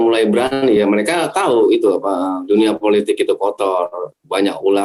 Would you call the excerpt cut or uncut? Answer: uncut